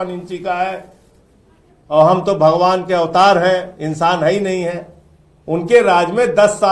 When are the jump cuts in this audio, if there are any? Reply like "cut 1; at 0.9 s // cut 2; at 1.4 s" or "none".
none